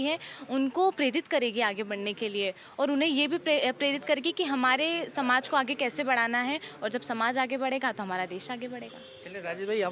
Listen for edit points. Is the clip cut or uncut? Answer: uncut